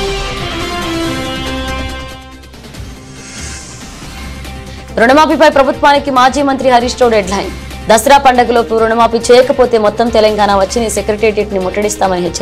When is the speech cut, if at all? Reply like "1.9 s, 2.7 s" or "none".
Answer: none